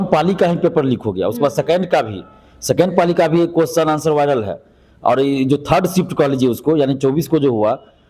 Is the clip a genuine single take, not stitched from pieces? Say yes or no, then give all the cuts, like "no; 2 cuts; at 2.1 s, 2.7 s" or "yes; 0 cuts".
yes; 0 cuts